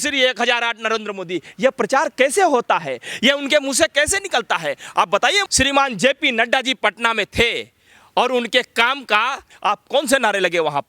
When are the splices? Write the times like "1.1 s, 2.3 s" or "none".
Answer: 5.5 s, 9.5 s